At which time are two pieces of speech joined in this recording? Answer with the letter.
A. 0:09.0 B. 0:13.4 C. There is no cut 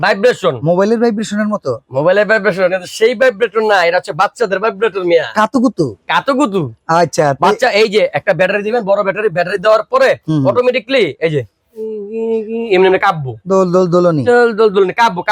C